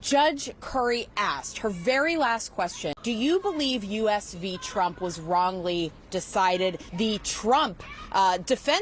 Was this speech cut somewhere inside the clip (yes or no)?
yes